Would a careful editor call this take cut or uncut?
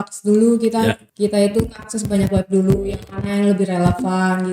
cut